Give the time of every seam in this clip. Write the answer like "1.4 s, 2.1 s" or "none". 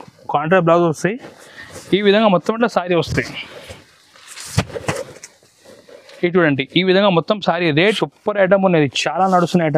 8.0 s